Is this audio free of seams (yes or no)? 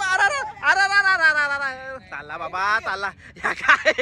yes